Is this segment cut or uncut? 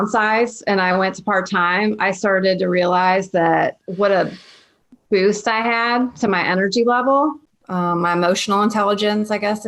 cut